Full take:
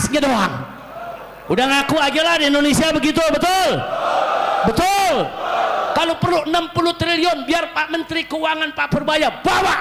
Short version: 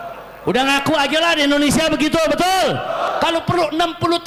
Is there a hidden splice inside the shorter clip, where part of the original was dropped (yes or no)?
yes